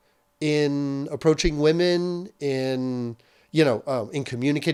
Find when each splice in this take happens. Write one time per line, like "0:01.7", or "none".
none